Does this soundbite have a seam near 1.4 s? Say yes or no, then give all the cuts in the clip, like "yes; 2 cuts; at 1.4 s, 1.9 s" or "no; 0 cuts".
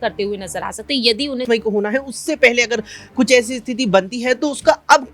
yes; 1 cut; at 1.4 s